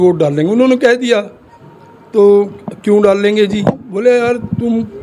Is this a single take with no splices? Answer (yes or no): yes